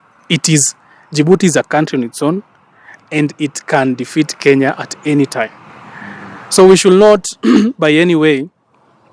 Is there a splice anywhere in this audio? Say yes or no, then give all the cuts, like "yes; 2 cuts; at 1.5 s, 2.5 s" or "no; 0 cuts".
no; 0 cuts